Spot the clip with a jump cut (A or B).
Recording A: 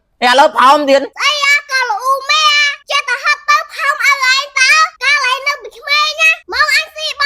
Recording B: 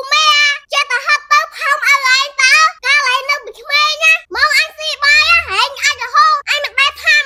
A